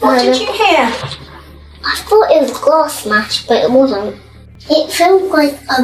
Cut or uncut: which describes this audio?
uncut